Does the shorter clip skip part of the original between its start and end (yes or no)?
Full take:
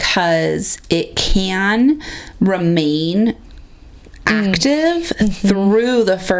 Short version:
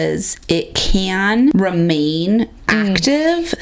yes